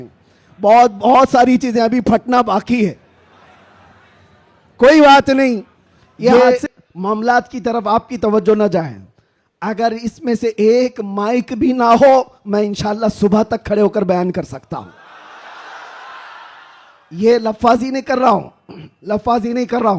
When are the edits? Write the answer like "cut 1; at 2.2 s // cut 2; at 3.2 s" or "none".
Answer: cut 1; at 6.3 s